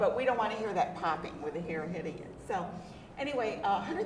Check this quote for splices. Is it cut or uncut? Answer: cut